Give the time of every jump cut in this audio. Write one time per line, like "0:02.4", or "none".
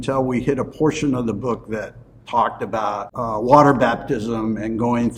0:03.1